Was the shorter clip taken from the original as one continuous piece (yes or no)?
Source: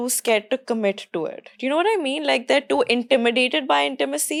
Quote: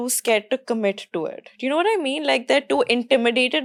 yes